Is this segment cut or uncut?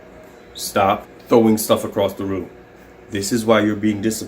cut